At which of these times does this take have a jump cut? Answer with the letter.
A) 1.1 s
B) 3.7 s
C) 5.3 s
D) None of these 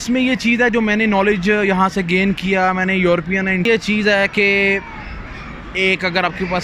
B